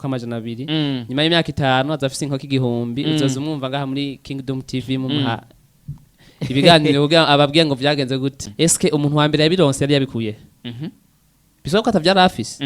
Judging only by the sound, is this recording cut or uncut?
cut